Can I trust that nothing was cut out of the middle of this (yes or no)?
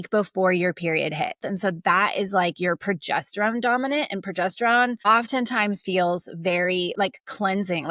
no